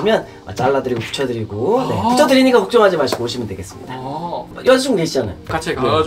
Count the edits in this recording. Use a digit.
1